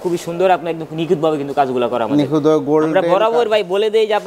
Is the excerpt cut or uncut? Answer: uncut